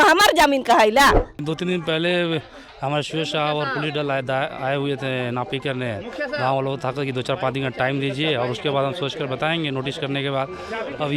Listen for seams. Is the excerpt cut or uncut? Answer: cut